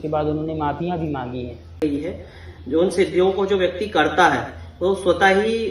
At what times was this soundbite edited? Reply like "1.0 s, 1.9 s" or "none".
1.8 s

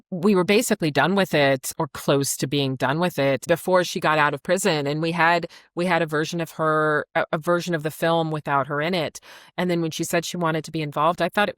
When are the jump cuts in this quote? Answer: 3.4 s

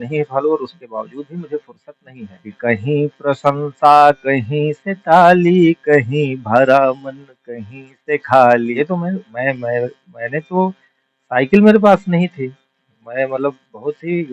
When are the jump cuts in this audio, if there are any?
2.5 s, 8.7 s

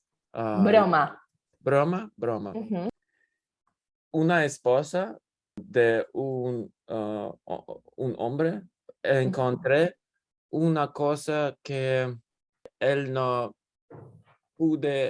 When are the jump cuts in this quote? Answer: 2.9 s, 5.6 s, 12.7 s

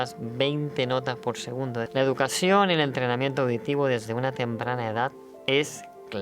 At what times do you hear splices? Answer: 1.9 s, 5.3 s

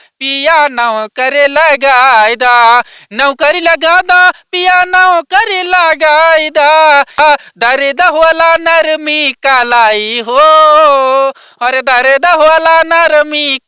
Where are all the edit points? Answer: 7.2 s

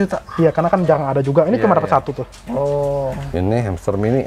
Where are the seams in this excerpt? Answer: 3.2 s

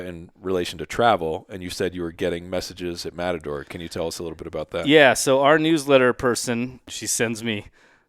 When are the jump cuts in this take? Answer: 6.9 s

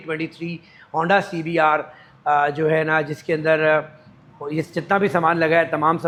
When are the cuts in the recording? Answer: none

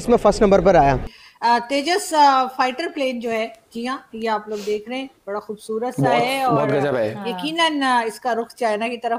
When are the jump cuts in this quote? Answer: 1.1 s

